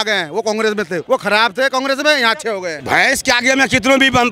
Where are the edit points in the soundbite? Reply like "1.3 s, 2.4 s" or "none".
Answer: 1.0 s, 2.8 s